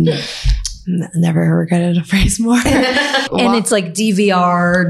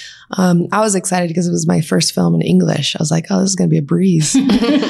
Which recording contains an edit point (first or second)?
first